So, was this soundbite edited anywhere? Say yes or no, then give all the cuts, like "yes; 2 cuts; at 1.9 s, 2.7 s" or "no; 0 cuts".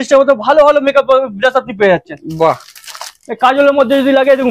no; 0 cuts